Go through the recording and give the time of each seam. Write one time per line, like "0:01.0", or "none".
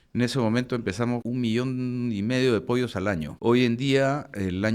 0:01.2
0:03.3

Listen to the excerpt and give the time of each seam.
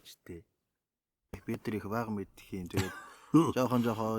0:01.5

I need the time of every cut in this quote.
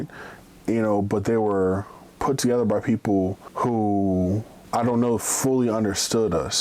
0:03.4
0:04.5

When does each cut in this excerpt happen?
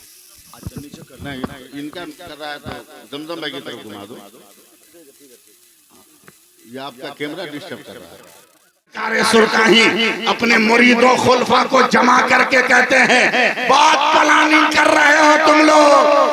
0:09.0

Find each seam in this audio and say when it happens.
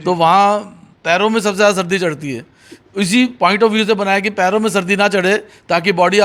none

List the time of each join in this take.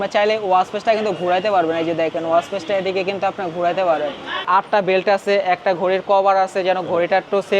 0:04.5

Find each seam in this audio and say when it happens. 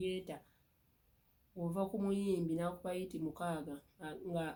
none

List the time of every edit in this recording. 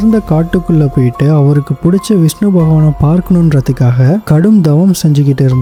none

